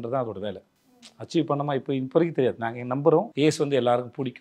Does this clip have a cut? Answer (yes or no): yes